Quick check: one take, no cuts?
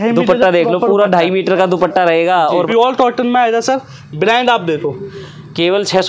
no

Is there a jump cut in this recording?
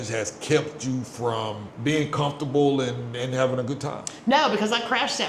yes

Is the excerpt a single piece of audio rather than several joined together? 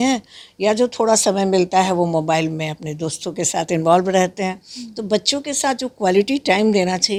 yes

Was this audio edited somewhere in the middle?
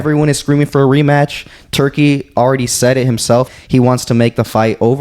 yes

